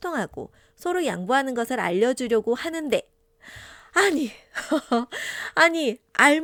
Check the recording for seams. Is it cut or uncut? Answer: uncut